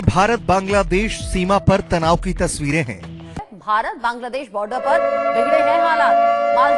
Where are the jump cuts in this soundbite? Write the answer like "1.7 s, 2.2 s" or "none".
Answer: 3.5 s